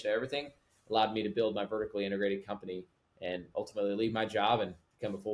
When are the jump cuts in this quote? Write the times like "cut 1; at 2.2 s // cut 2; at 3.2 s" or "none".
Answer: none